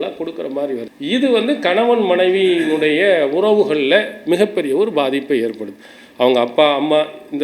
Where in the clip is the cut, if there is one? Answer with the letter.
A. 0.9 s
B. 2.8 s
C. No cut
A